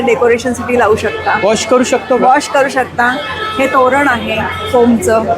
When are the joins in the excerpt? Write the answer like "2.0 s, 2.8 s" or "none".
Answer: none